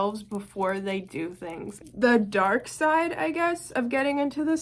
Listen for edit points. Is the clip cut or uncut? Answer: cut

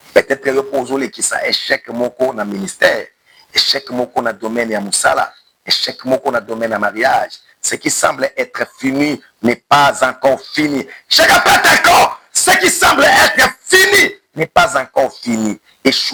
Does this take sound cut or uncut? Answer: uncut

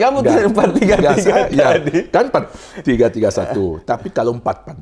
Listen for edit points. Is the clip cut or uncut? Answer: uncut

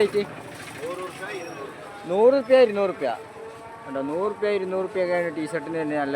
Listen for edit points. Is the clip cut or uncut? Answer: uncut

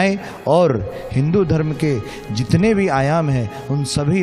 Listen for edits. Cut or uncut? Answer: uncut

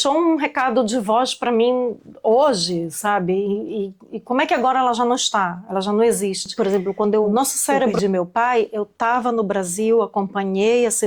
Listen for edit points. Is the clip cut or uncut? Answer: cut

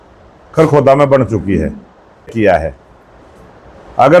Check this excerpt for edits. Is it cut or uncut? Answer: cut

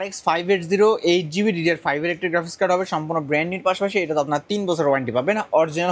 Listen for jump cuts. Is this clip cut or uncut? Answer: uncut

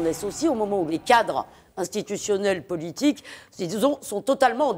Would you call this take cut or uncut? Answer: cut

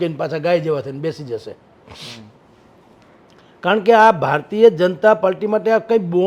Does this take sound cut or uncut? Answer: uncut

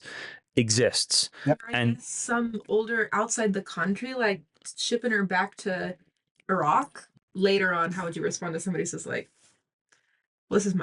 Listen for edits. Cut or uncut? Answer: cut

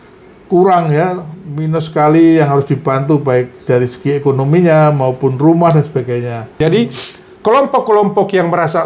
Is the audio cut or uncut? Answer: cut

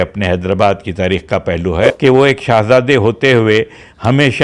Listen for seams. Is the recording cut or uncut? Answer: cut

